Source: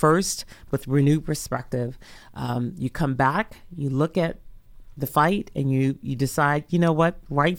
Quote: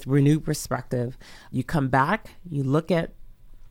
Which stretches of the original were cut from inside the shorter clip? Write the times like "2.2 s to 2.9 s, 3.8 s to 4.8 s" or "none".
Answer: 2.3 s to 2.7 s